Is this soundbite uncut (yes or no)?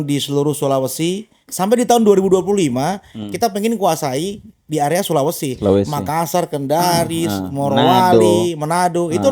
no